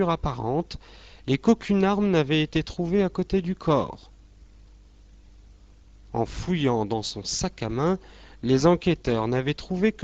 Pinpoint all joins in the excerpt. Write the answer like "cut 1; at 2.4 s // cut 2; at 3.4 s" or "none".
none